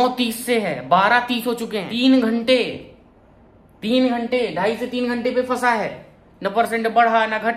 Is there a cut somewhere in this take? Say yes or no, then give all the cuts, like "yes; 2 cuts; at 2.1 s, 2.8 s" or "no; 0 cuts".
yes; 1 cut; at 1.9 s